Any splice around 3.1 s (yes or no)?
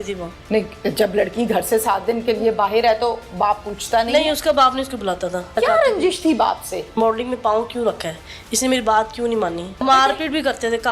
no